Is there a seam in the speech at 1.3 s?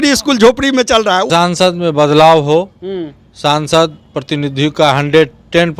yes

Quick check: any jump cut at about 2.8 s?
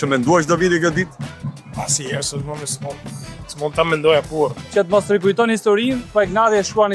no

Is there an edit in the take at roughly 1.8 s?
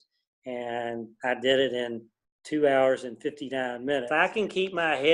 no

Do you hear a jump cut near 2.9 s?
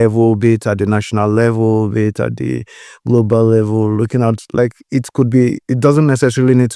no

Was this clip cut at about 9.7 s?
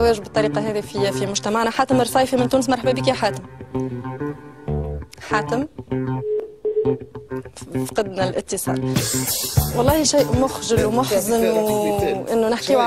yes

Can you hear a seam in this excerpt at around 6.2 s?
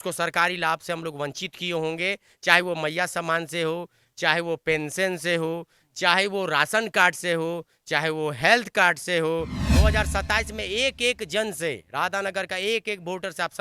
no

